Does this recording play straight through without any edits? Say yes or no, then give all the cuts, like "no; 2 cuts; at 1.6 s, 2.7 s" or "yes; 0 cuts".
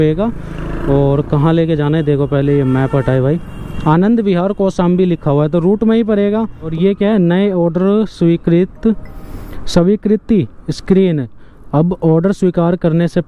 no; 1 cut; at 6.7 s